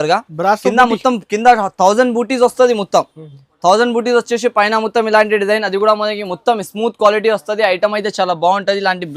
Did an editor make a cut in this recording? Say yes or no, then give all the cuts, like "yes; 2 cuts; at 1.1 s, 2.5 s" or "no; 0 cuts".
no; 0 cuts